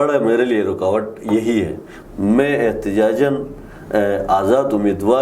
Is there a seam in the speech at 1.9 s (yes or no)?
yes